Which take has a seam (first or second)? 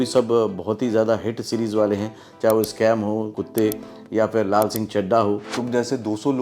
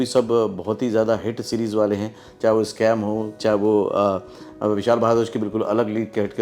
first